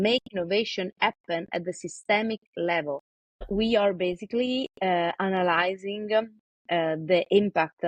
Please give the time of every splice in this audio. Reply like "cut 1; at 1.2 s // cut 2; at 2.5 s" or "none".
cut 1; at 3.5 s